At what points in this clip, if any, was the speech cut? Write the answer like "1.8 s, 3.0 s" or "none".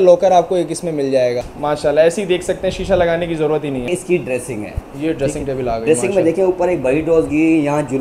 1.5 s, 3.9 s